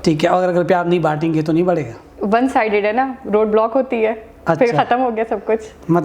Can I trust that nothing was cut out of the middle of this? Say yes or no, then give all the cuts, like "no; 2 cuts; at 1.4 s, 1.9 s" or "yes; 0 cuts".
yes; 0 cuts